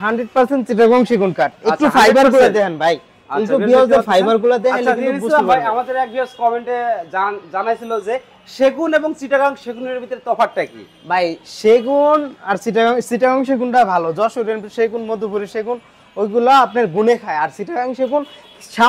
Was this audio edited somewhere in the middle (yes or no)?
no